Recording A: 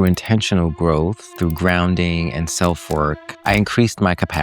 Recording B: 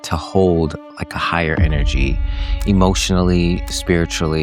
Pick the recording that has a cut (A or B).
A